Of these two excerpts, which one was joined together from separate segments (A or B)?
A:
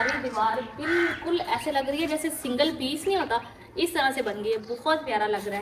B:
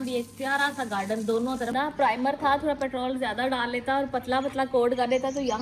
B